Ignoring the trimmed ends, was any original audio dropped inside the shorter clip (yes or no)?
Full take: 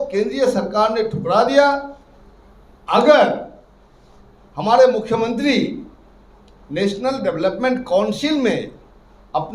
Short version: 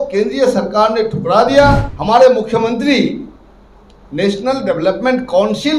yes